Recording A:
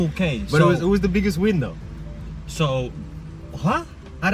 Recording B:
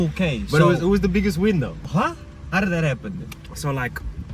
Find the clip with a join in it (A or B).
B